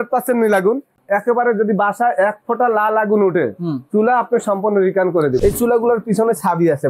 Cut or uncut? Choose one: cut